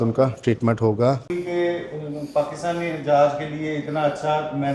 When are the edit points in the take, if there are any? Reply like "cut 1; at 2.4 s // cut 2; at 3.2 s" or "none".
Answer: cut 1; at 1.3 s